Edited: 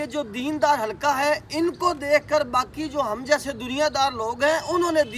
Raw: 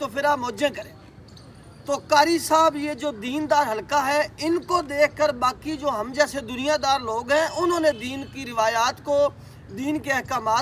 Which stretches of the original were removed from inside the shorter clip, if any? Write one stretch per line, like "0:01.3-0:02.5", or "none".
none

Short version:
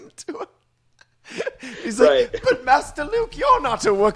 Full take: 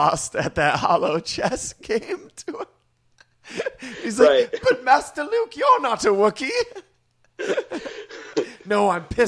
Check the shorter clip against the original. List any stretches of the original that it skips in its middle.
none

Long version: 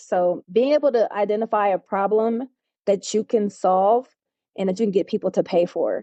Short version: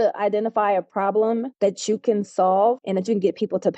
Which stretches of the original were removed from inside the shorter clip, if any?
0:02.5-0:02.7
0:04.1-0:04.5

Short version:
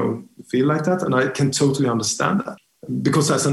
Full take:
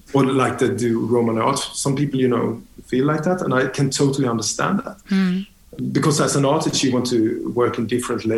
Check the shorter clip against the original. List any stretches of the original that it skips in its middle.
0:05.0-0:05.5

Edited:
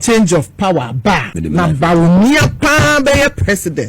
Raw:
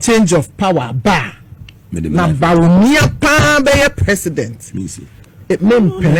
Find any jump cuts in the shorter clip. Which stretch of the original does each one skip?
0:01.3-0:01.9

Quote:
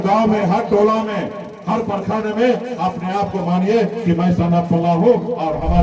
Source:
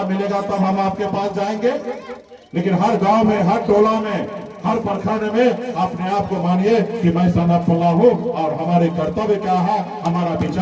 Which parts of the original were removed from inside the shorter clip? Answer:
none

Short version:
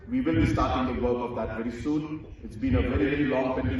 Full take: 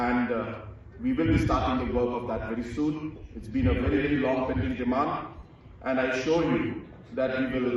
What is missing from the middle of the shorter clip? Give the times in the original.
none

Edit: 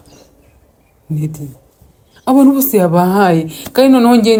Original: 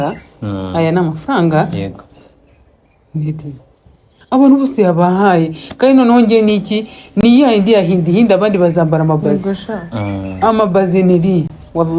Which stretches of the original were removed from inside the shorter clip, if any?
none

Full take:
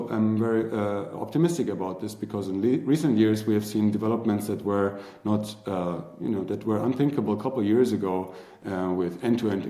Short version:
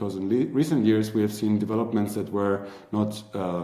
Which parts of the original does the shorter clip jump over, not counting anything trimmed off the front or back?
none

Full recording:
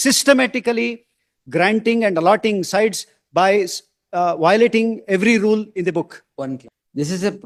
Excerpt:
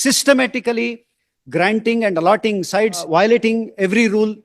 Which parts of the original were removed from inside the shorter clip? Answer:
0:03.0-0:04.3

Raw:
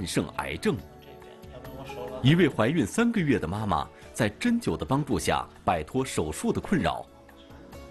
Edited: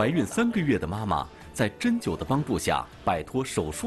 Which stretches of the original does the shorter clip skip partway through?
none

